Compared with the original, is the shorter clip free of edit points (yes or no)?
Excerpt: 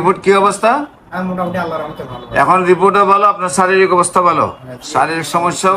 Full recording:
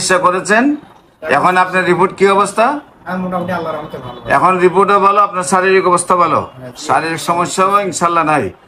yes